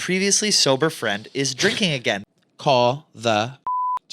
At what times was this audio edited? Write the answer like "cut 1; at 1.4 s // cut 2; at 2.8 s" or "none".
cut 1; at 2.2 s

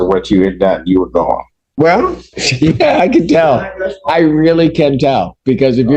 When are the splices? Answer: cut 1; at 1.7 s

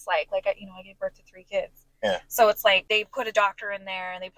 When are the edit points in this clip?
cut 1; at 2.8 s

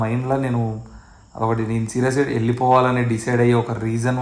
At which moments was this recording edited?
cut 1; at 2.7 s

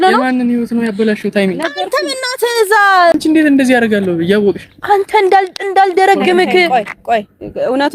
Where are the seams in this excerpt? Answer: cut 1; at 3.2 s

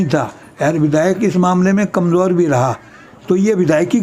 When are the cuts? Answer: cut 1; at 3.1 s

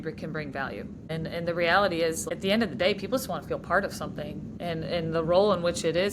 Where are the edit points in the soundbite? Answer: cut 1; at 1.0 s // cut 2; at 2.2 s // cut 3; at 4.5 s

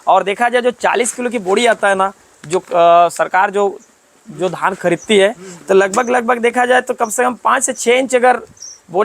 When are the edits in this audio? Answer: none

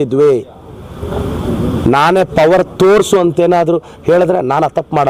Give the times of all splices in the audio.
none

